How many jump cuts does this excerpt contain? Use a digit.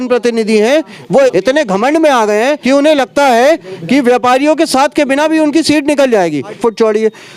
3